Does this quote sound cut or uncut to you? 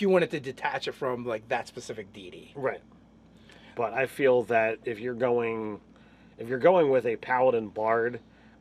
cut